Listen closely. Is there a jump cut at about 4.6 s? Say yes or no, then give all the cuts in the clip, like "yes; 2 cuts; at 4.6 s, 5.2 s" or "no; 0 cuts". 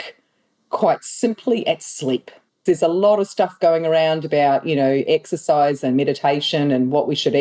no; 1 cut; at 2.5 s